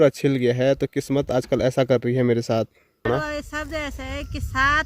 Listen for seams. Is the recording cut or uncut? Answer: cut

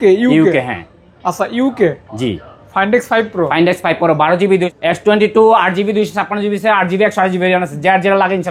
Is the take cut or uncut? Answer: cut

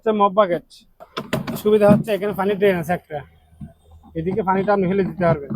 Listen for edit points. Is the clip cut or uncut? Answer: cut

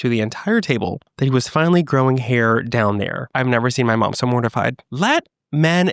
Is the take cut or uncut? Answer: cut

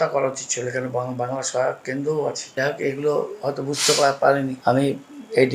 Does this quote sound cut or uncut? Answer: cut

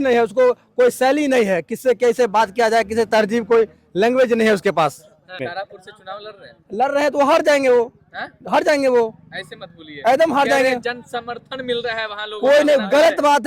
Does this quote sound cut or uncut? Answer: cut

